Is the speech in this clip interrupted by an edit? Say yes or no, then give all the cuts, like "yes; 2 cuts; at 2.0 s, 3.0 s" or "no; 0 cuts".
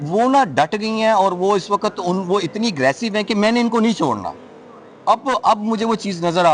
no; 0 cuts